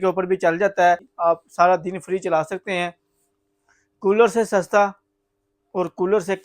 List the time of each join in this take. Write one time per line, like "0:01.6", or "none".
0:01.1